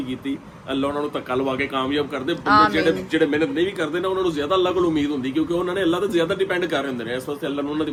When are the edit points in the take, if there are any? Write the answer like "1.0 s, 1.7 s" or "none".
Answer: none